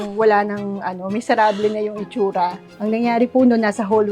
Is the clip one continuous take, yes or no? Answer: yes